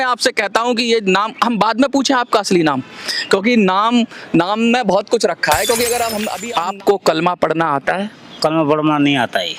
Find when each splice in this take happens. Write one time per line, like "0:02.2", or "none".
0:06.3